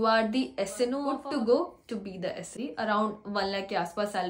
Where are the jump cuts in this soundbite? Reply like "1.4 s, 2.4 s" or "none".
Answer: 1.1 s, 2.6 s